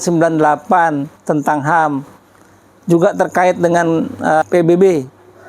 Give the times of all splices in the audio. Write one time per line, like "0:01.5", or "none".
0:04.4